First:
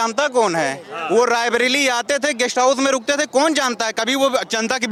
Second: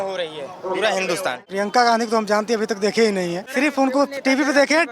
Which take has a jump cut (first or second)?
second